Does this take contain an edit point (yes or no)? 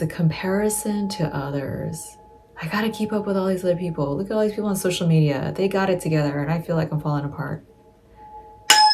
no